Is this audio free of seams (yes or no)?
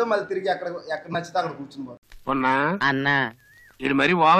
no